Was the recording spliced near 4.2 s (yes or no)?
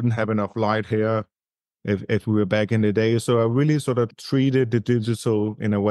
yes